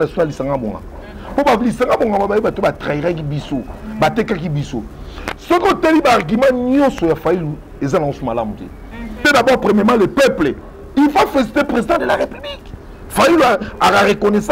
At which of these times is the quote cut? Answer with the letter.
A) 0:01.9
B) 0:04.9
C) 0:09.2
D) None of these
C